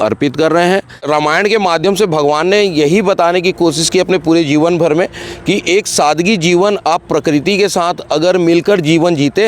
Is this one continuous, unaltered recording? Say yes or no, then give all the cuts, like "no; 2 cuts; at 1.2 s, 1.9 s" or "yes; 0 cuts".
no; 1 cut; at 1.0 s